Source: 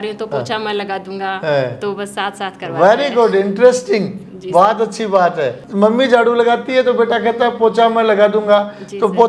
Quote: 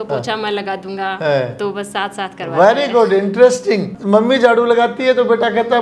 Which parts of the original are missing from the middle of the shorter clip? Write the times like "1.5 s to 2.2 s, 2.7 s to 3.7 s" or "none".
4.2 s to 5.6 s